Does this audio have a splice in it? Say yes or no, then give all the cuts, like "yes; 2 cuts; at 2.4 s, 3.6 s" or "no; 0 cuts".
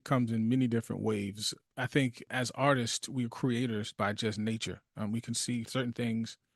yes; 3 cuts; at 1.6 s, 2.3 s, 5.7 s